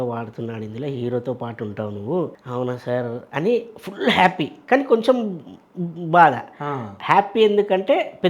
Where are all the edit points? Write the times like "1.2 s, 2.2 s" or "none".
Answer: 2.4 s